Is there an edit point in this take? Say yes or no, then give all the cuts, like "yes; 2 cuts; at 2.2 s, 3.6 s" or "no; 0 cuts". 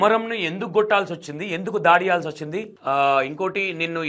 no; 0 cuts